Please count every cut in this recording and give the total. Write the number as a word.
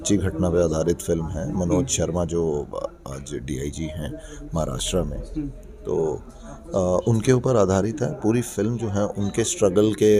zero